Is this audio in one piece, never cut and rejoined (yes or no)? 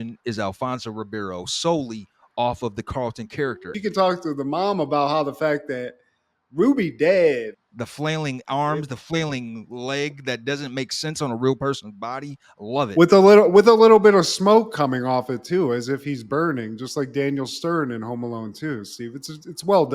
no